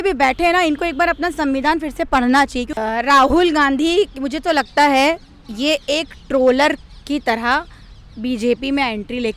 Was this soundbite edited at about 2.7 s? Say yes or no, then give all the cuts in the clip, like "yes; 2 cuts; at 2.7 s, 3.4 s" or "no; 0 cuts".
yes; 1 cut; at 2.7 s